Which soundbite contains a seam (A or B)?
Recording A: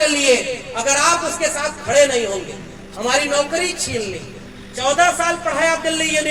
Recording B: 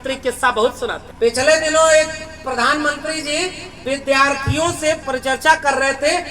B